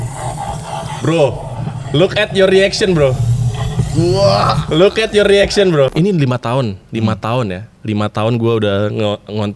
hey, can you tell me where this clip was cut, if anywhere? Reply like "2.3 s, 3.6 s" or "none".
5.9 s